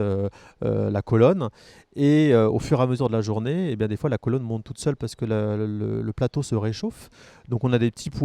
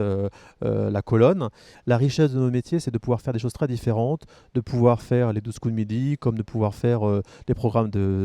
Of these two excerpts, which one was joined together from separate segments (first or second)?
second